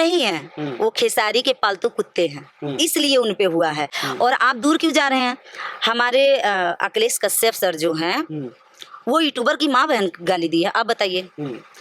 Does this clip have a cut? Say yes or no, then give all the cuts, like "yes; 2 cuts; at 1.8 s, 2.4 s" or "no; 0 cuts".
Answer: no; 0 cuts